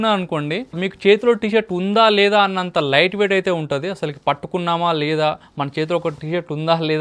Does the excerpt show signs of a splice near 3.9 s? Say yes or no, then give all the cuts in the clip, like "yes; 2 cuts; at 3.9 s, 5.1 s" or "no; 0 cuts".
no; 0 cuts